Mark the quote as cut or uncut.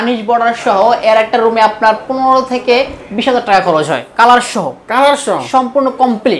uncut